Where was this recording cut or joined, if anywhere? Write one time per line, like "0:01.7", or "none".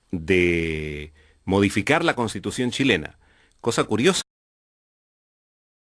none